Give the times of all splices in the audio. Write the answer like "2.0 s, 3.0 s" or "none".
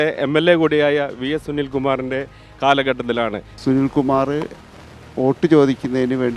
3.5 s

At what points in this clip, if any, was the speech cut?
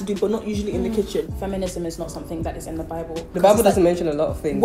1.3 s, 3.3 s

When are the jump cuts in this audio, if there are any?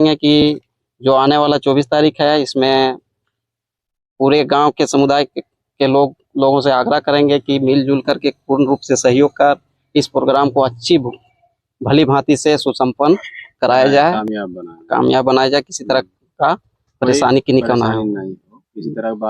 none

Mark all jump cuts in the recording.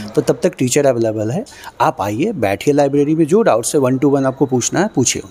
none

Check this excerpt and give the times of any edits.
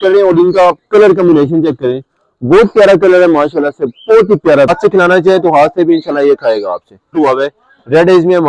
4.7 s, 7.1 s

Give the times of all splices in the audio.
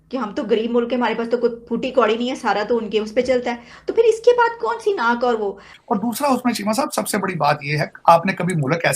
5.7 s

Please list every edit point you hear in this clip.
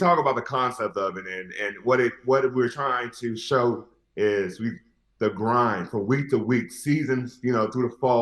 none

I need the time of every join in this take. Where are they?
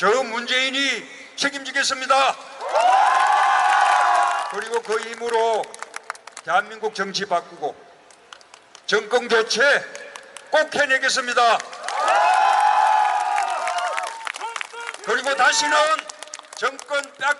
4.4 s, 13.2 s

